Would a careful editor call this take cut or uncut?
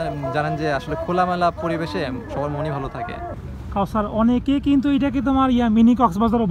cut